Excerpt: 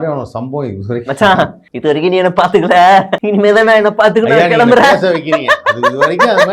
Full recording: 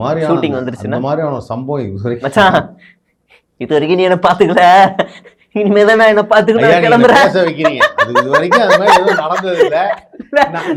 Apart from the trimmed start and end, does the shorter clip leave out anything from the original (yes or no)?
yes